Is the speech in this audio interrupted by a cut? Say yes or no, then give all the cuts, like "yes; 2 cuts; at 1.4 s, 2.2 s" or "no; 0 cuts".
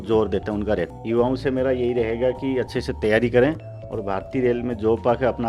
yes; 1 cut; at 0.9 s